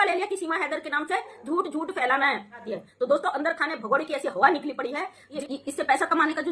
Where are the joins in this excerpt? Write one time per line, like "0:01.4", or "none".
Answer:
0:02.6
0:05.3